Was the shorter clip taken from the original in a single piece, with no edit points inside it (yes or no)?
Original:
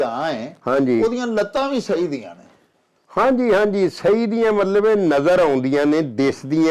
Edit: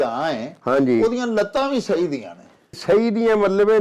no